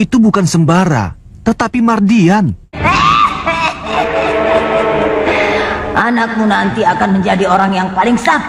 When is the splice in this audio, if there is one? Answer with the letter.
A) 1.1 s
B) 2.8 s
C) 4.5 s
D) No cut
B